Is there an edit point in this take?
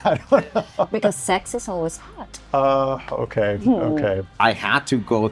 yes; 1 cut; at 4.4 s

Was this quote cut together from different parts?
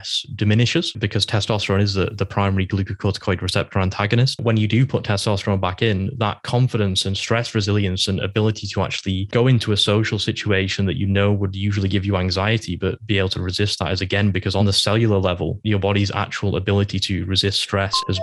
no; 0 cuts

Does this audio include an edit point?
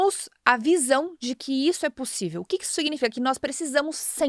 no; 0 cuts

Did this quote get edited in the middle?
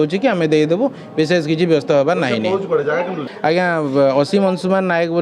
yes; 1 cut; at 3.3 s

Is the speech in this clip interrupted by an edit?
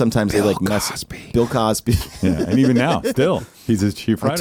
no; 0 cuts

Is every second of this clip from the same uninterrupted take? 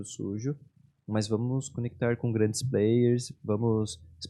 yes; 0 cuts

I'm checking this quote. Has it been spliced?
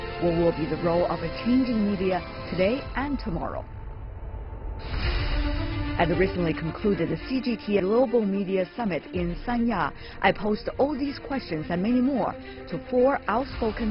yes; 1 cut; at 7.8 s

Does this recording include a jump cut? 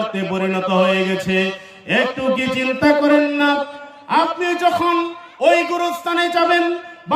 no; 0 cuts

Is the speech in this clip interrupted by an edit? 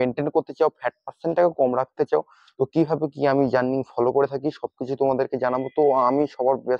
no; 0 cuts

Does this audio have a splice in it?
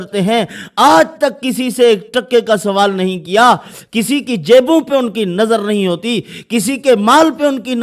no; 0 cuts

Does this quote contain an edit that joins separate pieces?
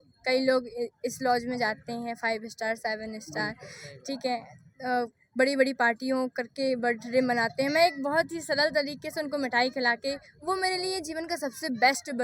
no; 0 cuts

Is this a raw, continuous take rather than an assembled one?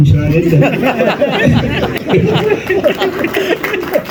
yes; 0 cuts

